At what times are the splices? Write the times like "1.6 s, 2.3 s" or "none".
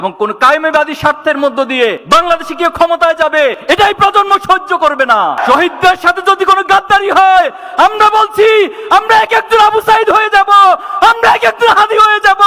5.4 s